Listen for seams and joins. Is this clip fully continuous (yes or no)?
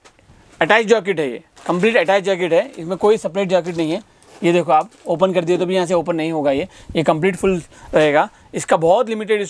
yes